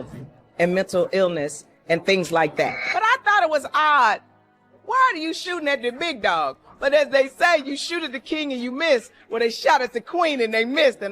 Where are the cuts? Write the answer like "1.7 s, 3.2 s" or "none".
9.2 s